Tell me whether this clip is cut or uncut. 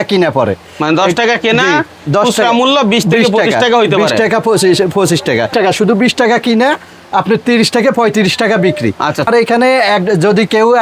cut